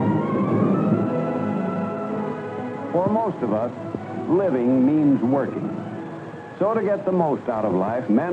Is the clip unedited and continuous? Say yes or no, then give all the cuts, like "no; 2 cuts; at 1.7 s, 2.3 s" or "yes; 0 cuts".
no; 1 cut; at 0.9 s